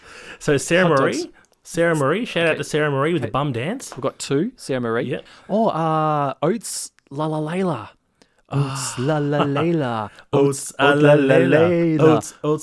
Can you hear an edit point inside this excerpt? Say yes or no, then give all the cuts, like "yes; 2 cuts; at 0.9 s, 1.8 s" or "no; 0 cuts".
yes; 1 cut; at 5.3 s